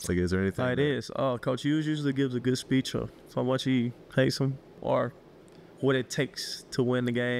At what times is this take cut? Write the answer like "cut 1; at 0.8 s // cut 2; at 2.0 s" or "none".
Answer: cut 1; at 3.2 s // cut 2; at 4.7 s